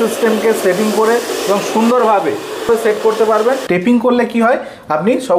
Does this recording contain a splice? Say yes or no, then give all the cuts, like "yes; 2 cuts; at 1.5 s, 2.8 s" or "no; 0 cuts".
yes; 2 cuts; at 2.7 s, 3.6 s